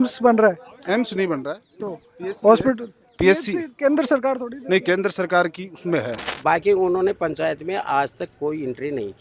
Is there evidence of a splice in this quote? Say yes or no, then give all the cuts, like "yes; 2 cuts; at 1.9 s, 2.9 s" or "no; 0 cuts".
yes; 1 cut; at 6.2 s